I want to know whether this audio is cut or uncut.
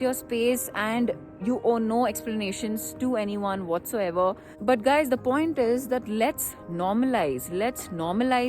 cut